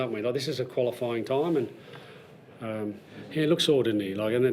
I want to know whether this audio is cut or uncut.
cut